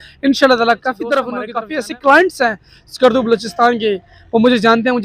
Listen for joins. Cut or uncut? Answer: cut